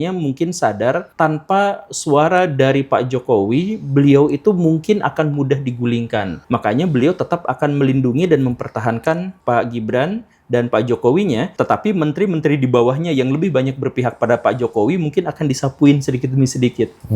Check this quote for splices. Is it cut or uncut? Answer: cut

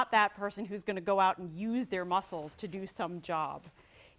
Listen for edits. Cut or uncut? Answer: cut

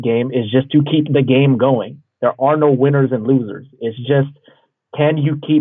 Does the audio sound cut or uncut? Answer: uncut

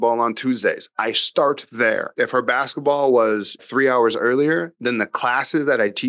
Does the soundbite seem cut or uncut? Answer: cut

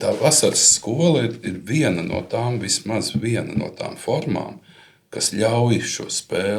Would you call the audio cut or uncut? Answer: uncut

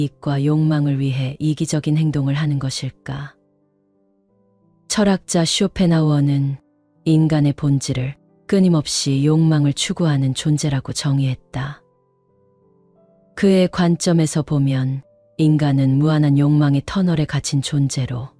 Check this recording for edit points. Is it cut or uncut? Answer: cut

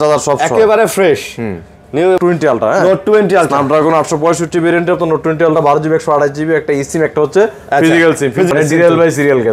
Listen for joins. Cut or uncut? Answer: cut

